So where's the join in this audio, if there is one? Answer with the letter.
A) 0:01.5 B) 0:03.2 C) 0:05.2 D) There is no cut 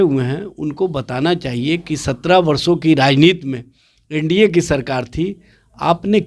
D